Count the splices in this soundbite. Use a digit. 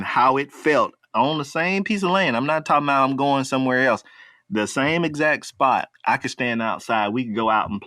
2